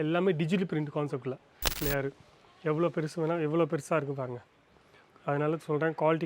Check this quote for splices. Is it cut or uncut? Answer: cut